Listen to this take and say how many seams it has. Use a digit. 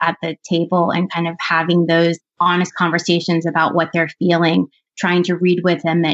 0